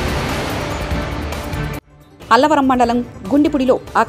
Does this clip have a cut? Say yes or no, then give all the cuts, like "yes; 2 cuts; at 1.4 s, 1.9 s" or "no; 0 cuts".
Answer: yes; 1 cut; at 1.8 s